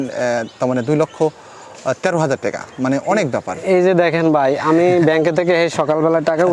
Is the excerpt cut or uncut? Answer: uncut